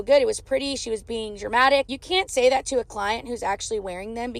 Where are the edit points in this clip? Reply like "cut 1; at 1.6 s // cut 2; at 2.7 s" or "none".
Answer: cut 1; at 1.9 s